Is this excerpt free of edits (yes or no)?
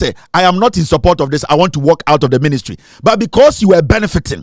yes